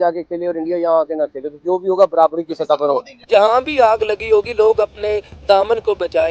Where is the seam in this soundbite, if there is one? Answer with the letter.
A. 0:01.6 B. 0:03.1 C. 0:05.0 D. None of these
B